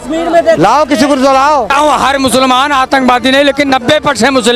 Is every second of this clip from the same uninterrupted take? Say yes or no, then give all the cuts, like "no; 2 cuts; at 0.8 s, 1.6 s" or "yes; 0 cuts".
no; 1 cut; at 1.7 s